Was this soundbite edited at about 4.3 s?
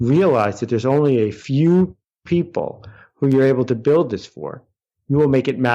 no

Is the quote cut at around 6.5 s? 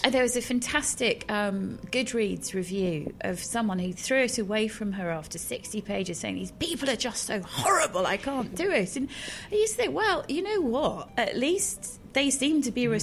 no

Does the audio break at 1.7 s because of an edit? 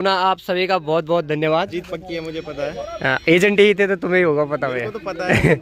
yes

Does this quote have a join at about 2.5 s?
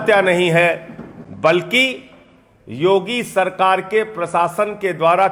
no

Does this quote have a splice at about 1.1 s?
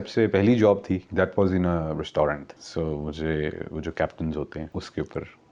yes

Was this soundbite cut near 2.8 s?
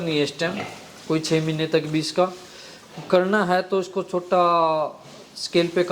no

